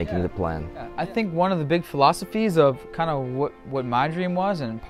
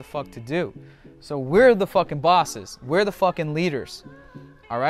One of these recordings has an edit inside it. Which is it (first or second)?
first